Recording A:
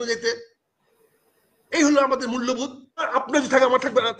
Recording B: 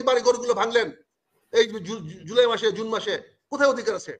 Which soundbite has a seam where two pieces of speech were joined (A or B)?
A